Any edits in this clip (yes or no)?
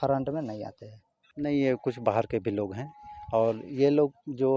yes